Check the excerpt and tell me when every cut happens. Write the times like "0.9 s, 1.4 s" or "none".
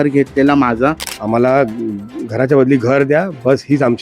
1.1 s